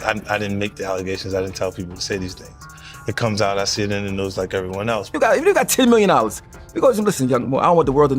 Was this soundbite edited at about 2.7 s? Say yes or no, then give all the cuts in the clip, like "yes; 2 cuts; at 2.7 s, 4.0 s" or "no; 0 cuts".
no; 1 cut; at 5.1 s